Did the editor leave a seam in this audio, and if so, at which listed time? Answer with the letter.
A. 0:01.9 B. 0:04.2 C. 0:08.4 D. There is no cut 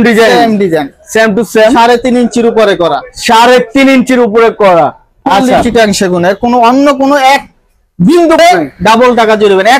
C